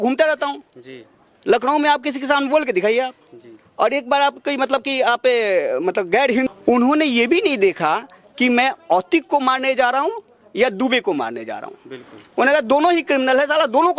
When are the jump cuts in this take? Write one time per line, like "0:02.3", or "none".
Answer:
0:06.5

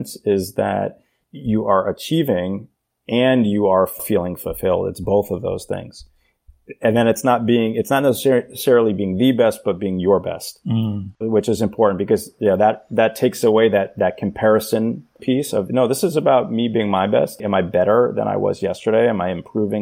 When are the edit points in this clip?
0:11.2
0:15.2
0:17.4

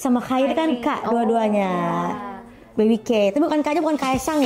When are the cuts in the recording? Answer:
none

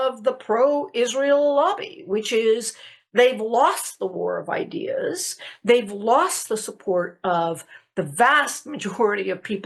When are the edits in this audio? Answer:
none

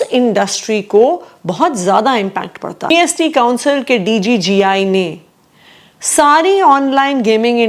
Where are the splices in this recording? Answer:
0:02.9

